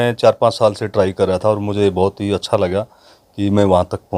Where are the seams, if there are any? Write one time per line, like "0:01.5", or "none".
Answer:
none